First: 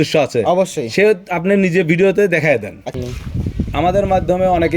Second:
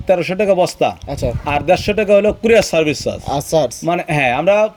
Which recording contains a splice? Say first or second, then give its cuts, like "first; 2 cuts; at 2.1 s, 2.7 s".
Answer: first; 1 cut; at 2.9 s